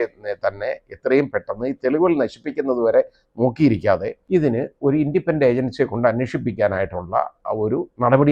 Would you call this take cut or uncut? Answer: cut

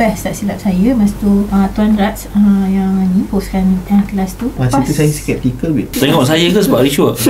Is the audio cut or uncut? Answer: cut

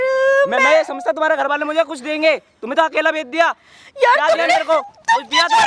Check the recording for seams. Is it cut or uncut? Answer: uncut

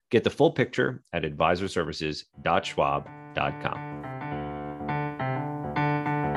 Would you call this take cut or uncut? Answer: cut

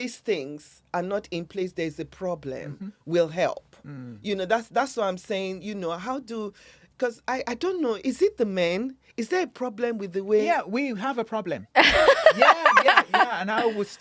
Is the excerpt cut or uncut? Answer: uncut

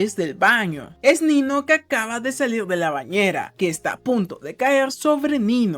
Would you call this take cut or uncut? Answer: cut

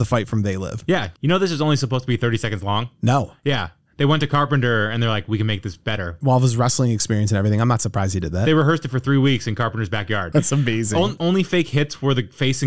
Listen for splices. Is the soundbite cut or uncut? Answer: cut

